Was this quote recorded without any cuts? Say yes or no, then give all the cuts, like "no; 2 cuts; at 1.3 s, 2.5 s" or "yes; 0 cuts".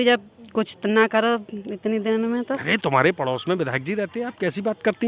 yes; 0 cuts